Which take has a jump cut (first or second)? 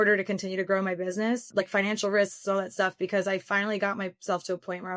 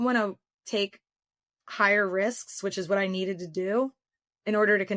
first